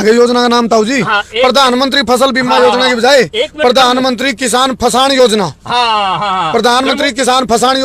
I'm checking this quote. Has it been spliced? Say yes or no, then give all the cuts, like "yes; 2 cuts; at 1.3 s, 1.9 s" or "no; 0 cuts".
no; 0 cuts